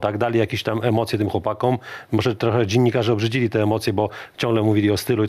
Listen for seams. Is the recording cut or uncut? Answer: uncut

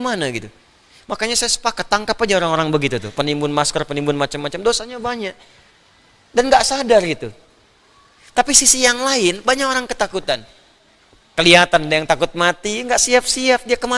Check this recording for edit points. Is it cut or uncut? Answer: uncut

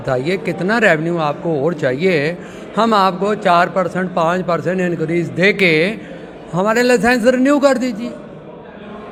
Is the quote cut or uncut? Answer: uncut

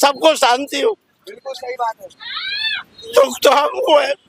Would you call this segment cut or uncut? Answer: uncut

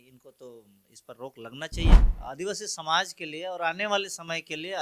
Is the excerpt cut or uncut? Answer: cut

